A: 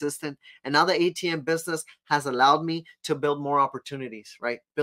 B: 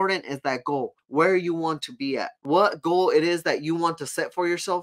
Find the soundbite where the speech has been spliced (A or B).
B